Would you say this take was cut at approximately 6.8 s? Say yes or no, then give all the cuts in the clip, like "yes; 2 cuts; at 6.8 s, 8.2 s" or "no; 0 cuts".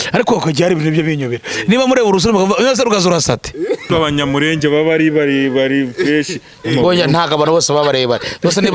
no; 1 cut; at 3.9 s